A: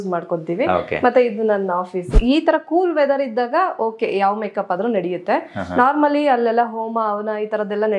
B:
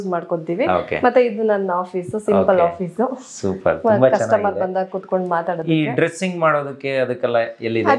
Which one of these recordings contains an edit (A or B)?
A